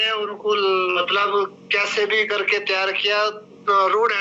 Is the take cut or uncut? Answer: cut